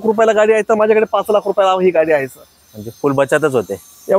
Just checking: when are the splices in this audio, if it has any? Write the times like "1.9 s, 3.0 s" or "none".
none